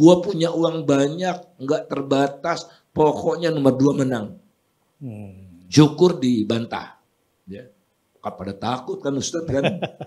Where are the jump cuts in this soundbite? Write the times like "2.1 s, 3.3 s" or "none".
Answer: none